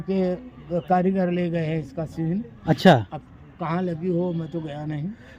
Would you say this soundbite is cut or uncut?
uncut